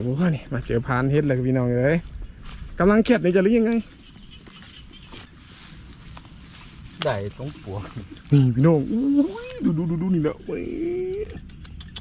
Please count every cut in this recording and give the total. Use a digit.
0